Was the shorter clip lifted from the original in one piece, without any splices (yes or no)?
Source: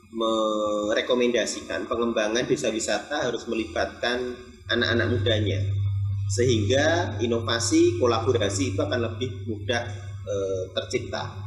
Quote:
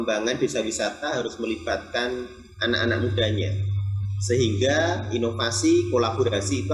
yes